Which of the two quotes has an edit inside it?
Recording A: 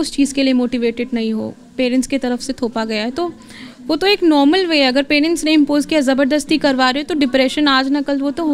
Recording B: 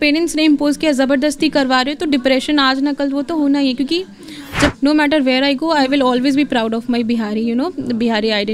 B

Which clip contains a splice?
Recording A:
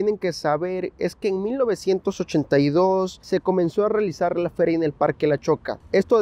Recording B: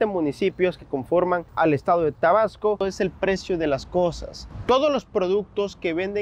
B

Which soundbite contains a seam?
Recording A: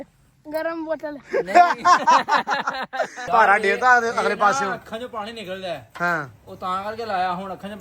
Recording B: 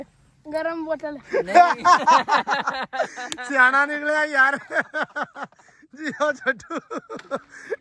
A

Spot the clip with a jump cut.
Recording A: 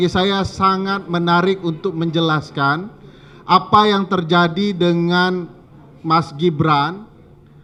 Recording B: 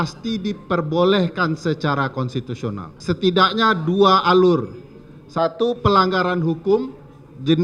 B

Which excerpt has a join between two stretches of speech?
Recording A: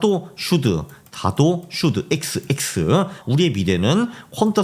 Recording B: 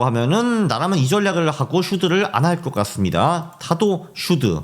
A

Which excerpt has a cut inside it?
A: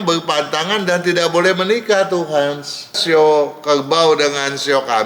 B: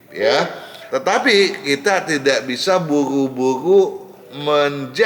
A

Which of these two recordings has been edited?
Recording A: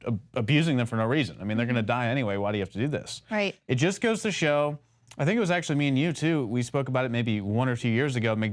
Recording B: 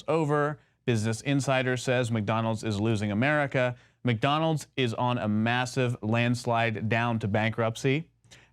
B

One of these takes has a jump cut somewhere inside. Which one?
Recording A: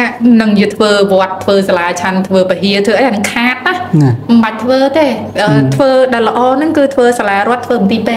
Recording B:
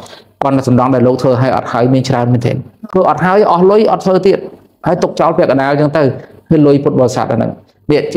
B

